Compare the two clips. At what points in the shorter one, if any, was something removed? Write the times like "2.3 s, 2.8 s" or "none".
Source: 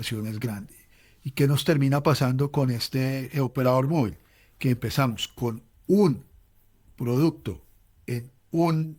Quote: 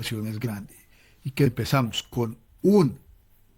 1.5 s

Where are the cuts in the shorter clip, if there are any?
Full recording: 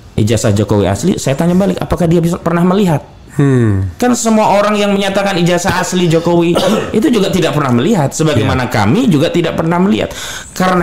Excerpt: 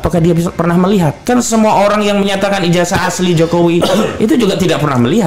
1.2 s

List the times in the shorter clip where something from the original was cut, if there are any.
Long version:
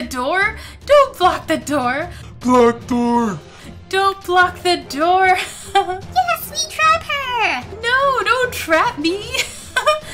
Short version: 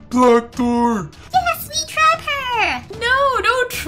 1.2 s

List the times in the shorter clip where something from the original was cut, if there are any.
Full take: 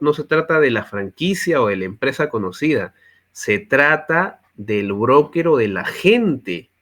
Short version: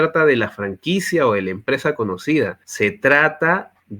2.6 s

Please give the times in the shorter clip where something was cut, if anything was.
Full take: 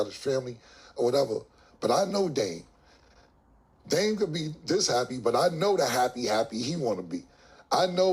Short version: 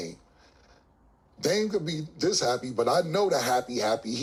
none

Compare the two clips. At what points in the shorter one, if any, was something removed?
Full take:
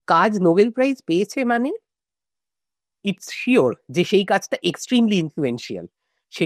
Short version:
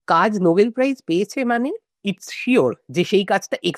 1.9 s

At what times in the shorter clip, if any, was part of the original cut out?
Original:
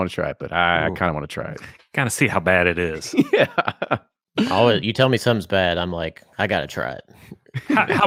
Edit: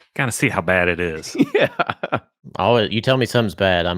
2.6 s

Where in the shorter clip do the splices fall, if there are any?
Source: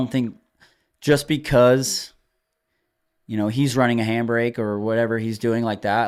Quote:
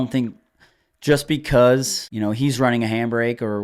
2.0 s

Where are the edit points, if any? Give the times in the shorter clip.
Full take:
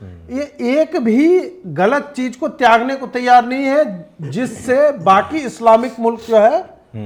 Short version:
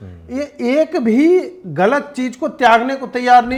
none

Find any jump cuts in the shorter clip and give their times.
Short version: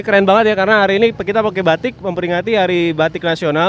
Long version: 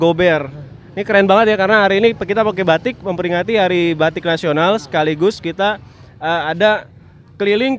none

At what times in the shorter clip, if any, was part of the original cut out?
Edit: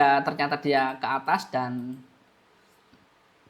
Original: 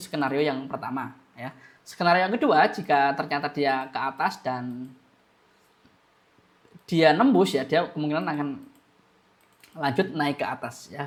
none

